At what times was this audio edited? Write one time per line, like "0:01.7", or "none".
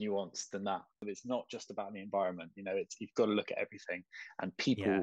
0:01.1